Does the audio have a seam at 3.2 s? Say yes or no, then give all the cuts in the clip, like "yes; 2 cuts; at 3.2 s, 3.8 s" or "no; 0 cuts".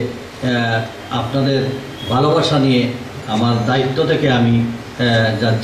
yes; 1 cut; at 3.2 s